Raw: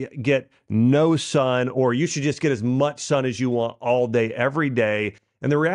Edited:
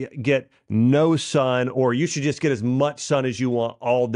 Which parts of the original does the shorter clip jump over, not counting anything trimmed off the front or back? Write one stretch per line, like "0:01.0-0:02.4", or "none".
none